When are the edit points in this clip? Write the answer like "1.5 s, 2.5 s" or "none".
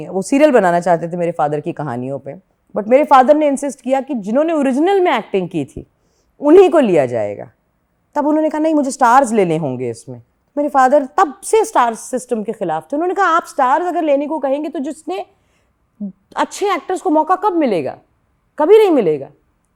none